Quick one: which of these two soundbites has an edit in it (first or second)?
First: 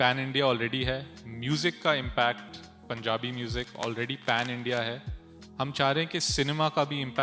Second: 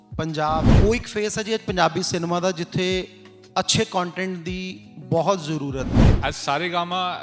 second